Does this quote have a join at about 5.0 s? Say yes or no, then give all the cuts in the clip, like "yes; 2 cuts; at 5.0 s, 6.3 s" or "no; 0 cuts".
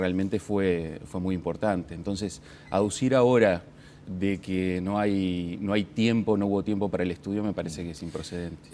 yes; 1 cut; at 5.0 s